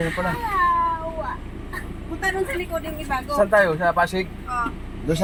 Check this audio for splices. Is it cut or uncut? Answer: uncut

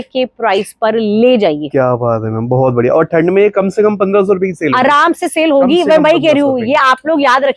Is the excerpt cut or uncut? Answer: uncut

